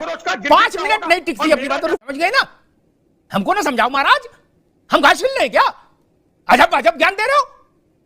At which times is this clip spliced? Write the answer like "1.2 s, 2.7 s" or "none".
2.0 s